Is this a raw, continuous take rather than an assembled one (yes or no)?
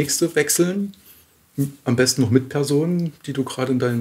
yes